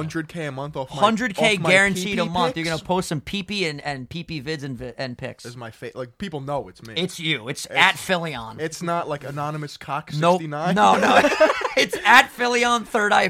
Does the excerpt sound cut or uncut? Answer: uncut